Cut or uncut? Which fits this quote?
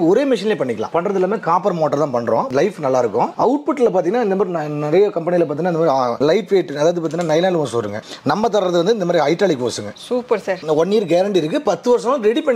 cut